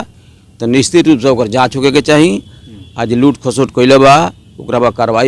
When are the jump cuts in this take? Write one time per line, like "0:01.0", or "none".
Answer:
none